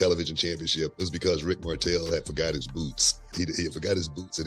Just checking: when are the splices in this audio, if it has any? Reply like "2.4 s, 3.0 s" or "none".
0.9 s, 3.3 s